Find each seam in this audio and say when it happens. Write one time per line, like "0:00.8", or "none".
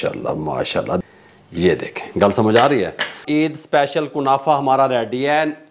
0:01.0
0:03.2